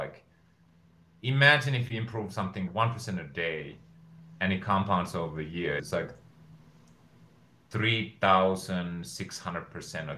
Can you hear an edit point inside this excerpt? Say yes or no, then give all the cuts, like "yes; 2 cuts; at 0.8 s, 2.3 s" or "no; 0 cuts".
yes; 2 cuts; at 2.7 s, 5.8 s